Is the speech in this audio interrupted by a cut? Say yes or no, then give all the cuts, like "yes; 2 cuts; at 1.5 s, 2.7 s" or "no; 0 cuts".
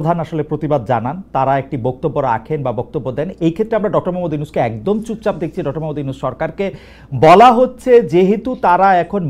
no; 0 cuts